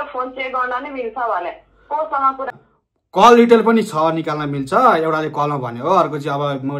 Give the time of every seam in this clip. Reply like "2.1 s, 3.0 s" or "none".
2.6 s